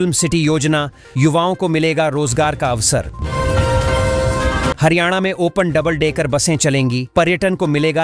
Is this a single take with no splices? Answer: no; 2 cuts; at 3.2 s, 4.8 s

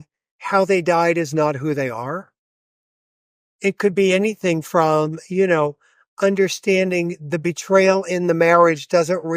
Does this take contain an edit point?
no; 0 cuts

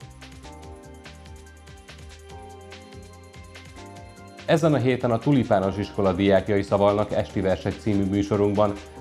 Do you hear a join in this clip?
no; 0 cuts

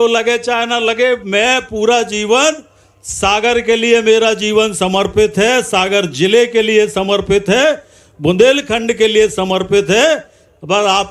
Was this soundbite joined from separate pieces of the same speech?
no; 0 cuts

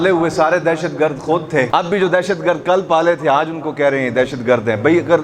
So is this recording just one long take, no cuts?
no; 1 cut; at 1.7 s

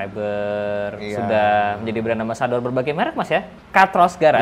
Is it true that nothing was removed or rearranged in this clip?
no; 1 cut; at 3.5 s

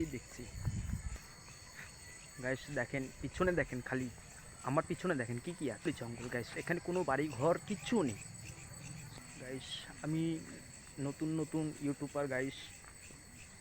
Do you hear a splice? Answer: yes; 3 cuts; at 1.2 s, 5.9 s, 9.1 s

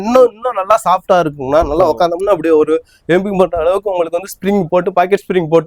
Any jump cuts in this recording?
no; 0 cuts

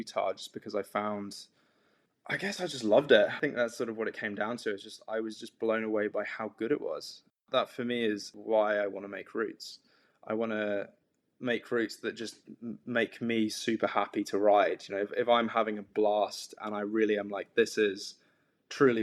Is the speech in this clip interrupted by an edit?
yes; 1 cut; at 3.4 s

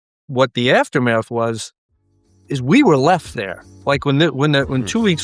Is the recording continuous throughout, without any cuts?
yes; 0 cuts

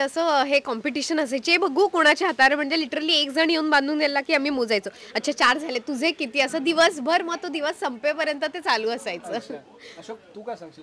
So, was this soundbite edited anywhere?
no; 0 cuts

